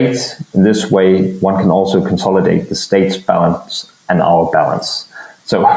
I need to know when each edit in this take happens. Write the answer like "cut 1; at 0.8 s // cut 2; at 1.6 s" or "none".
none